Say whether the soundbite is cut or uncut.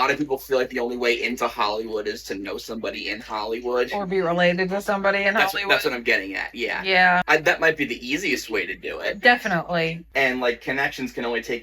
cut